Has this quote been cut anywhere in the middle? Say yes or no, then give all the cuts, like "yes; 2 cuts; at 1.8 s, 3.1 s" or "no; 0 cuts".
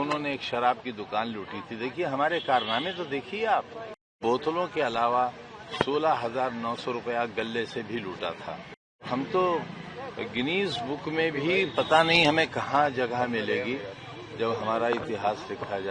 yes; 2 cuts; at 4.2 s, 9.1 s